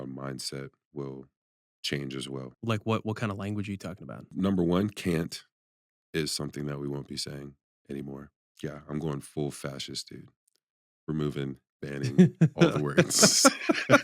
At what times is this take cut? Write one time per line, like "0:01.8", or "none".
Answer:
0:02.5
0:04.3
0:08.4